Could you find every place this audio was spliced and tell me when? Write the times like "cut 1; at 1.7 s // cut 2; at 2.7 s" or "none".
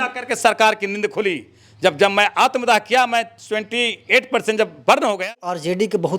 cut 1; at 5.3 s